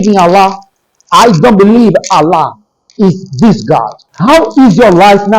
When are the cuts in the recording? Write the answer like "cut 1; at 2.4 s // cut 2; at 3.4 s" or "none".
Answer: cut 1; at 4.0 s